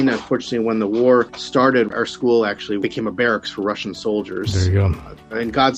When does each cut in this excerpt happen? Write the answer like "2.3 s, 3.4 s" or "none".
1.9 s